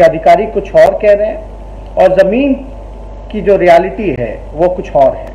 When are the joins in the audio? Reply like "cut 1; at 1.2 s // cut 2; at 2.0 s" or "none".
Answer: none

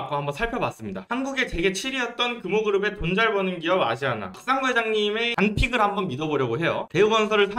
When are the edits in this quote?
cut 1; at 1.0 s

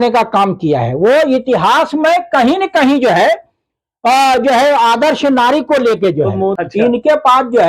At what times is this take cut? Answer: cut 1; at 6.6 s

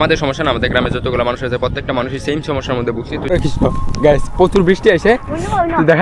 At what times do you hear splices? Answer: cut 1; at 3.3 s

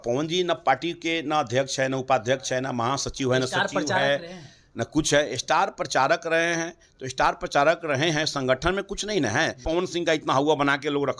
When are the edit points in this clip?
cut 1; at 9.6 s

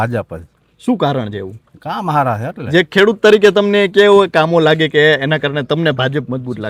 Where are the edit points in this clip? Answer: none

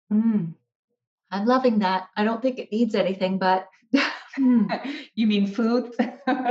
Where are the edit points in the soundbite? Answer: none

